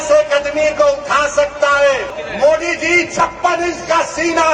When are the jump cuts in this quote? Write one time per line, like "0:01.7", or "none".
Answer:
0:02.2